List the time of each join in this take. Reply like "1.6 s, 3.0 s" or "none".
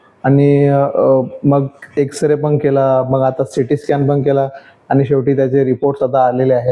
none